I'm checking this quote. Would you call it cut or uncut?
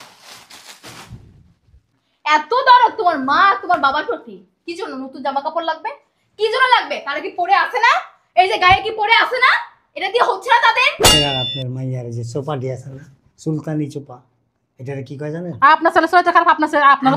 cut